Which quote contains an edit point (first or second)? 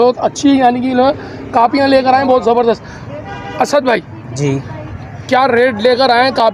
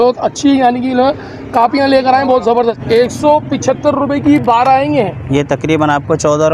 second